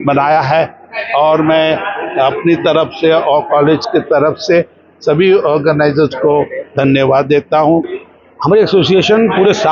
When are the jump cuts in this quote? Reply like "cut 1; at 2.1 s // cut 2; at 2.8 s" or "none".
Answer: cut 1; at 7.9 s